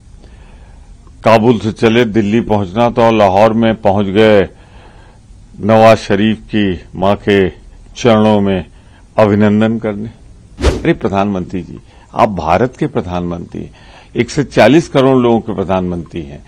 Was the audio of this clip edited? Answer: yes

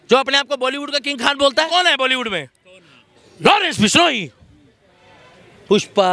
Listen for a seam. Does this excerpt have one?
yes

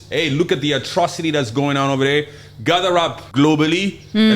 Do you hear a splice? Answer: yes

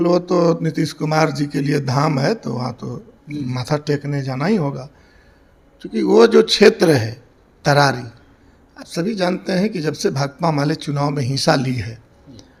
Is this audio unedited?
yes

